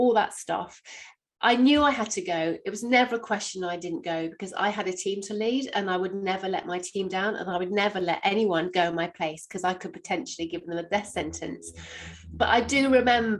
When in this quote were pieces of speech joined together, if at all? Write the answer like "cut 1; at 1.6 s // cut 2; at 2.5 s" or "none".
none